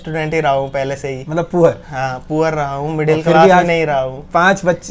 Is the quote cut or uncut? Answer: uncut